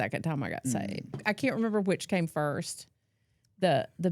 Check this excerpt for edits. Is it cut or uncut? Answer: cut